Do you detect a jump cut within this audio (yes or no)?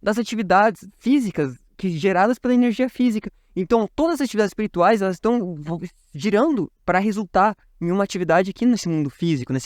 no